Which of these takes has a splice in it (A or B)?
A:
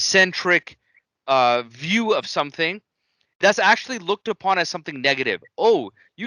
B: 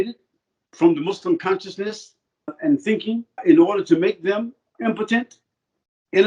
B